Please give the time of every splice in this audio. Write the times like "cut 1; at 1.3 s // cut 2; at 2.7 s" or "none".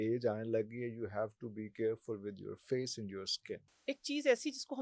cut 1; at 3.7 s